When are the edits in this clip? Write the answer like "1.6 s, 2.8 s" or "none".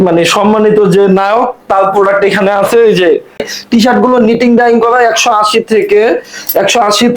3.5 s